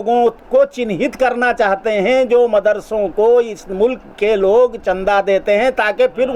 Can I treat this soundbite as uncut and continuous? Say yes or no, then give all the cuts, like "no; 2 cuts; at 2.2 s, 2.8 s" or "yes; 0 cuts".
yes; 0 cuts